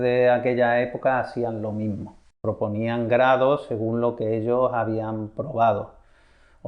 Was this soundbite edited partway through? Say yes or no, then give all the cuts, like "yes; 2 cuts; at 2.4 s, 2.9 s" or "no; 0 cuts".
yes; 1 cut; at 2.2 s